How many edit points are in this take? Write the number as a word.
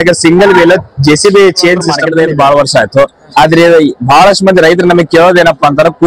one